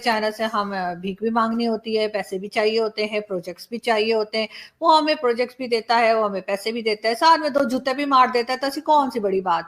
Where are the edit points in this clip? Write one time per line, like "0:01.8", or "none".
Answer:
none